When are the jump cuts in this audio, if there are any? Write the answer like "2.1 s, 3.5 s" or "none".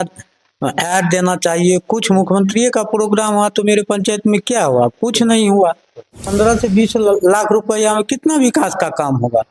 6.2 s